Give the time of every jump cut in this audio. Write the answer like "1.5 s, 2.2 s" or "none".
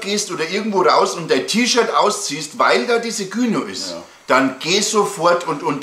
none

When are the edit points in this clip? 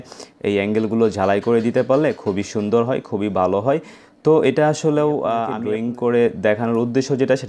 5.6 s

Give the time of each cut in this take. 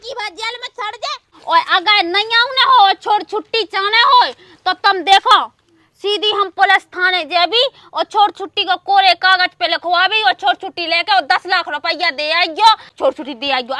1.3 s, 12.9 s

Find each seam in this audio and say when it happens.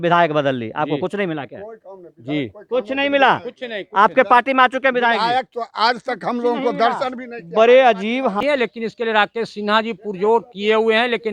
8.4 s

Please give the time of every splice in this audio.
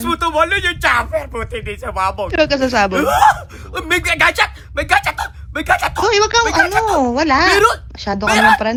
none

